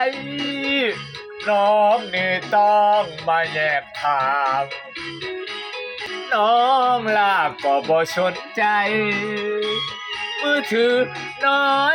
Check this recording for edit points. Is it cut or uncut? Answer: uncut